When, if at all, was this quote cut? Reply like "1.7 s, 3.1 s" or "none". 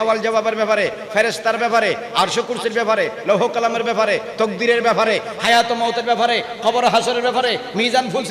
none